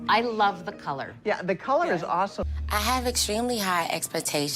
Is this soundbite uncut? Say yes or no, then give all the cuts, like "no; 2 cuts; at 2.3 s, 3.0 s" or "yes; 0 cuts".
no; 1 cut; at 2.4 s